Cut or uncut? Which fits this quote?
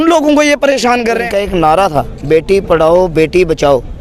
cut